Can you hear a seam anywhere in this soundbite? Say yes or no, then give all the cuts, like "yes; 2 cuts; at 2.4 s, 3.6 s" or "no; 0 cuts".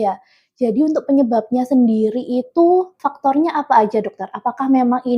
yes; 1 cut; at 3.0 s